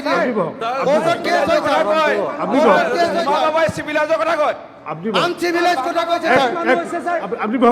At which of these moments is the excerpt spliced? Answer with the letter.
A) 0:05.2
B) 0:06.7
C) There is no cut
C